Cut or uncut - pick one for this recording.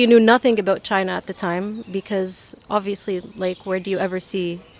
uncut